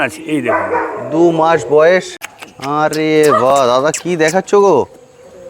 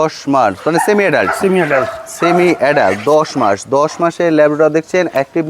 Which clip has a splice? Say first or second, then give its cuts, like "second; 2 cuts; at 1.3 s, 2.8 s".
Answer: first; 1 cut; at 2.1 s